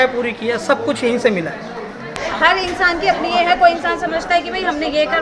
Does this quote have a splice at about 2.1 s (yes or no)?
yes